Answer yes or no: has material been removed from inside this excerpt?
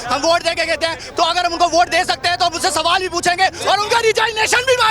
no